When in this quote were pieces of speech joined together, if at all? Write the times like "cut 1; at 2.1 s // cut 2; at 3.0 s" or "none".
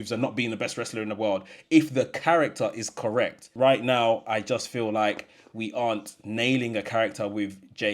cut 1; at 3.5 s